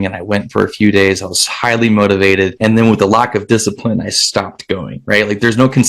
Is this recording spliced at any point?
yes; 1 cut; at 2.5 s

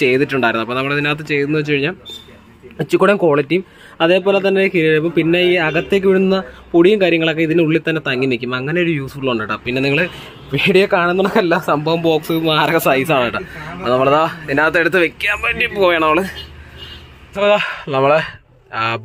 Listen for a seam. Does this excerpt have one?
no; 0 cuts

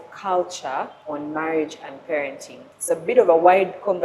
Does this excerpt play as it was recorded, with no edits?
no; 2 cuts; at 1.0 s, 2.7 s

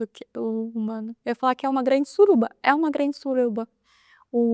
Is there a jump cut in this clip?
no; 0 cuts

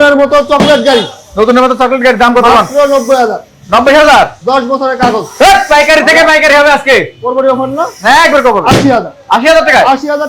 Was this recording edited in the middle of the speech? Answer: no; 0 cuts

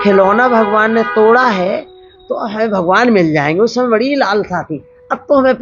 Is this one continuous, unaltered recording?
yes; 0 cuts

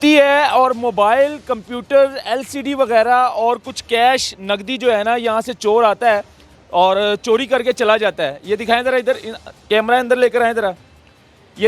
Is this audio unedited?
yes; 0 cuts

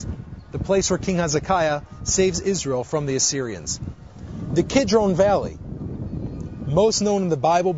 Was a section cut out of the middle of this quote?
no; 0 cuts

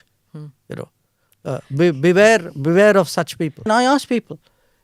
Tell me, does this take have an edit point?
yes; 1 cut; at 3.7 s

